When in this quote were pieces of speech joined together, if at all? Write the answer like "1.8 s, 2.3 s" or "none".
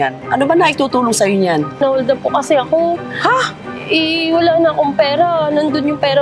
1.8 s